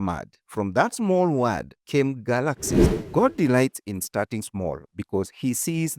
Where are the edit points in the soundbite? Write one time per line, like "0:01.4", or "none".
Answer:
0:03.1